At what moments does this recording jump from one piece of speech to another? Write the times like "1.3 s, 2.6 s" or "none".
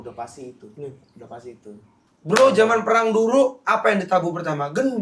2.1 s